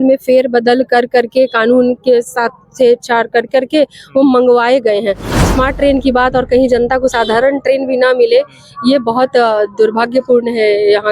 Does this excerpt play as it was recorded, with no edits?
no; 1 cut; at 5.5 s

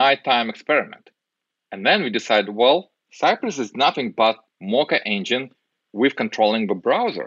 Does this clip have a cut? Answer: yes; 2 cuts; at 3.0 s, 4.5 s

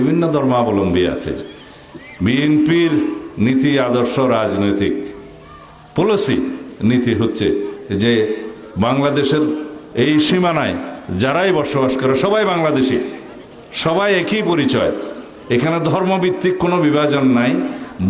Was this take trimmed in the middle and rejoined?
no; 0 cuts

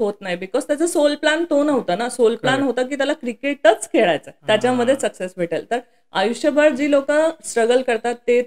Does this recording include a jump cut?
yes; 1 cut; at 4.3 s

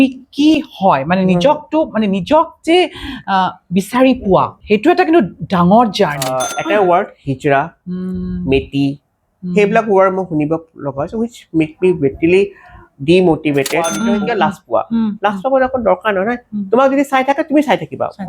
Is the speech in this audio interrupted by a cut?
yes; 2 cuts; at 6.5 s, 13.9 s

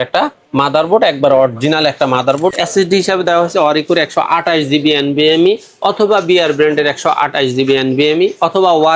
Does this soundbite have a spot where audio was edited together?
yes; 1 cut; at 2.5 s

